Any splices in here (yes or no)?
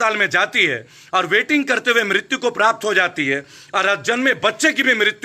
no